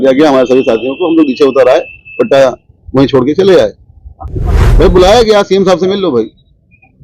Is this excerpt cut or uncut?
cut